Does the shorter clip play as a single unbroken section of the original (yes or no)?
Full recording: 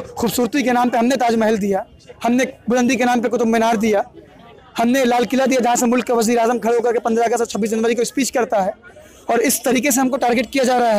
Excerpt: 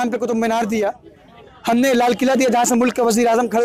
yes